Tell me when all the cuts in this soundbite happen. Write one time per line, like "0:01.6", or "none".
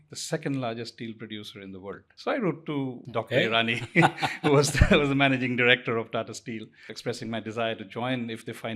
0:02.1
0:03.0
0:06.9